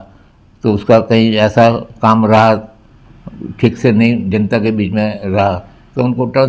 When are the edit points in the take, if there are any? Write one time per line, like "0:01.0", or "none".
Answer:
none